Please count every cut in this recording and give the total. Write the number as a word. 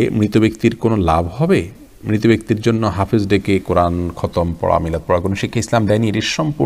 zero